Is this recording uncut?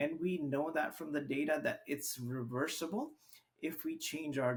yes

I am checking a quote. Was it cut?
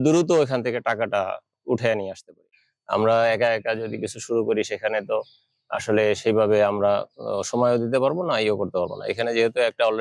yes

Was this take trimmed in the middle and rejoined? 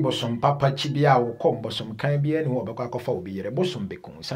no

